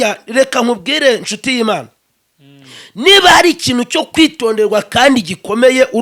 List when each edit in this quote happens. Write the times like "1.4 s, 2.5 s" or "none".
none